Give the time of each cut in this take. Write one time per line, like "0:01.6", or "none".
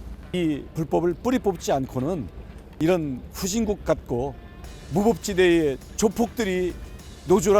0:02.8